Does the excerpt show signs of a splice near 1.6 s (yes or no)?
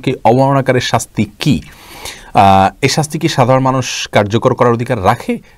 no